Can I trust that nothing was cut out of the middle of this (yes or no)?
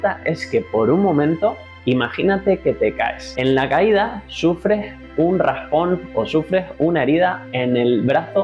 no